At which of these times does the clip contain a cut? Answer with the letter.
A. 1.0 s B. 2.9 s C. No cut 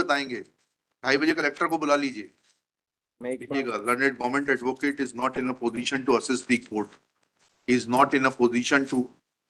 C